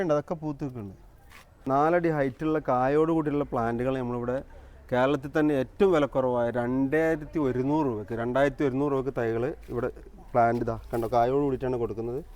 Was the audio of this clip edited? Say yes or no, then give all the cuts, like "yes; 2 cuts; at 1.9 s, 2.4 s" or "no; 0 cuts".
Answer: yes; 1 cut; at 1.5 s